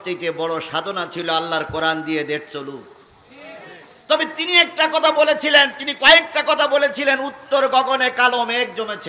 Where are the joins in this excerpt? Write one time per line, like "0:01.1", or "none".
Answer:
none